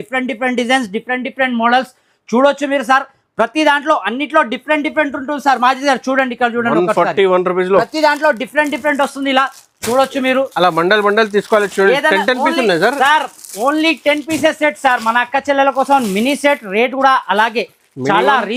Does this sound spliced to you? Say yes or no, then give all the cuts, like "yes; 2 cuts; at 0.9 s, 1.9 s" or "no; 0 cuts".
no; 0 cuts